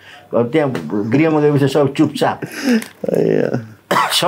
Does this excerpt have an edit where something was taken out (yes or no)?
no